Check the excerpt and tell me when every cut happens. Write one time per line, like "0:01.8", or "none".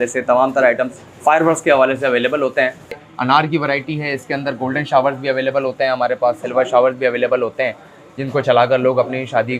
0:03.0